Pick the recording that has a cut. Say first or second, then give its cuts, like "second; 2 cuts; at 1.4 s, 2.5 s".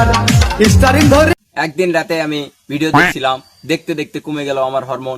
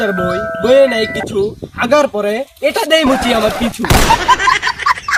first; 1 cut; at 1.3 s